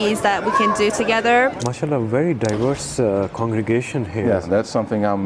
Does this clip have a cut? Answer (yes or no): yes